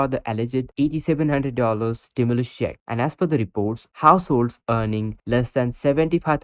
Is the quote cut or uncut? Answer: uncut